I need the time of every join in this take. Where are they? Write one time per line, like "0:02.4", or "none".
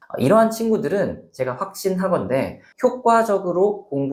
none